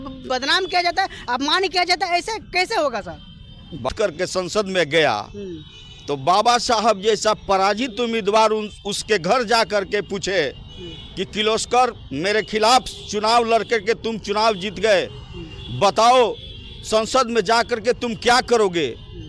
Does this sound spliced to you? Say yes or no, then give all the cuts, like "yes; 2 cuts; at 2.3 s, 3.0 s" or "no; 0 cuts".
yes; 2 cuts; at 2.5 s, 3.9 s